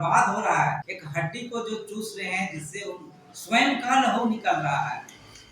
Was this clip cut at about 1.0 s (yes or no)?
yes